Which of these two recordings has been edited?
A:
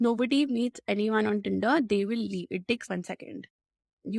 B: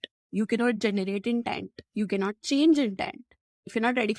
A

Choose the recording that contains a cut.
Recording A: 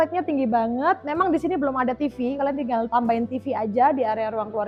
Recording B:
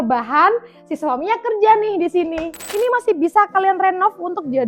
B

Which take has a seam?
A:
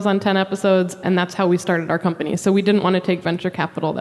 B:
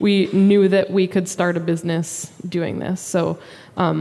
A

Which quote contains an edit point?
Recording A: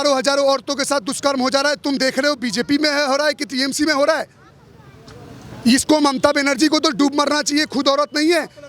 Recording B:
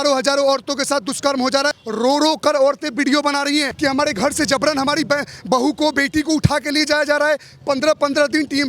B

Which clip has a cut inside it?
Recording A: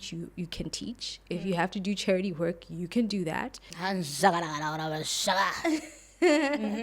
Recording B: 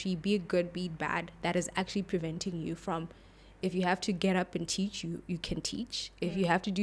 A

